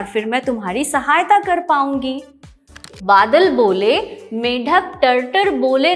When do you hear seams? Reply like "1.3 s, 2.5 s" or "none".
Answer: 2.8 s